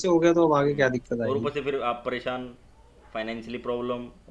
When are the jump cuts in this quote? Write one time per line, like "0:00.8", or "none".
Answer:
none